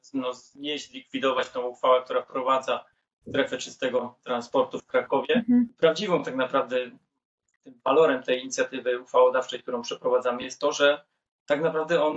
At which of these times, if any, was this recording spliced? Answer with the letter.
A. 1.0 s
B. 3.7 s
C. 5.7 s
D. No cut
C